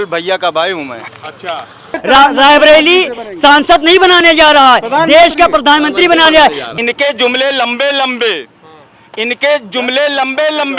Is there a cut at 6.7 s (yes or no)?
yes